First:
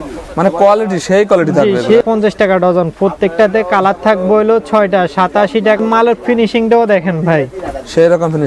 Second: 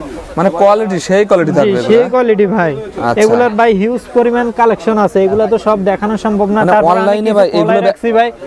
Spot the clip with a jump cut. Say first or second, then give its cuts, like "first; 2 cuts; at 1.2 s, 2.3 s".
first; 2 cuts; at 2.0 s, 5.8 s